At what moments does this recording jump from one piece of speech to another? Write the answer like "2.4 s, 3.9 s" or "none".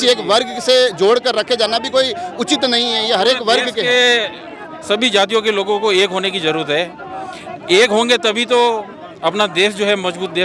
none